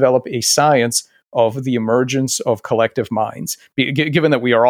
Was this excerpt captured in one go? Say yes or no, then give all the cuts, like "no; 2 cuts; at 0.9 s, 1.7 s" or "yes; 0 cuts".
yes; 0 cuts